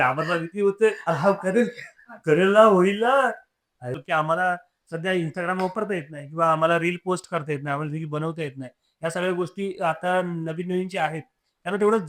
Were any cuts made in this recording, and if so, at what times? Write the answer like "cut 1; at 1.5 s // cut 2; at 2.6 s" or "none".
cut 1; at 3.9 s